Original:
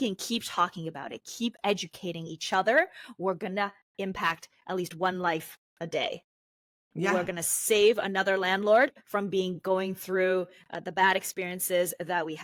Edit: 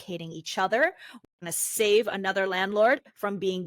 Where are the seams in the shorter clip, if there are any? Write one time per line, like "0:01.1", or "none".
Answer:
0:01.3